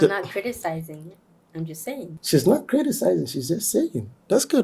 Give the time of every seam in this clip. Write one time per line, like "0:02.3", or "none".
0:02.2